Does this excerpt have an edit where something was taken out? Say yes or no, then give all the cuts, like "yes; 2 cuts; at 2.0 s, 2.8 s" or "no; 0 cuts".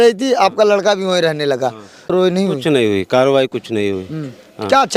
yes; 1 cut; at 2.1 s